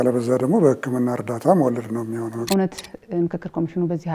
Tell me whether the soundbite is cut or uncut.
cut